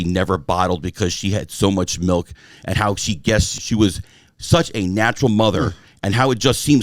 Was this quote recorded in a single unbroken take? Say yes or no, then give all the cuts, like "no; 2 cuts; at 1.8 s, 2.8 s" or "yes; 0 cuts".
no; 1 cut; at 3.5 s